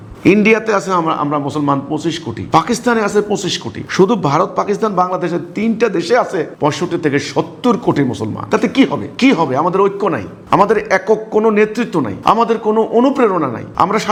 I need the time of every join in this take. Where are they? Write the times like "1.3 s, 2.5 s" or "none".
none